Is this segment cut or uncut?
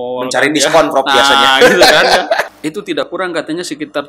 cut